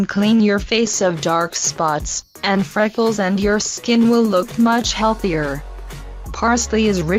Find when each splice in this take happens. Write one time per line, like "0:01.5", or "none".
none